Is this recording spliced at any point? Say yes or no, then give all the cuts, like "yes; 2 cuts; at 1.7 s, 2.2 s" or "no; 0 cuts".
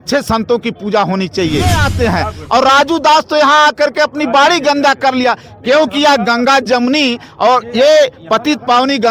yes; 1 cut; at 1.9 s